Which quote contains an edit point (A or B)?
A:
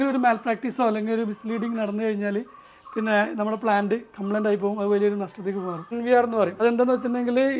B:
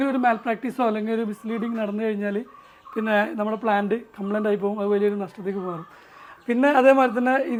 A